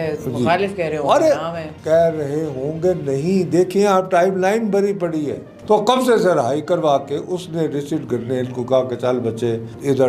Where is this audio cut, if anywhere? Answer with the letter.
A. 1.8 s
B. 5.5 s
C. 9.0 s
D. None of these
B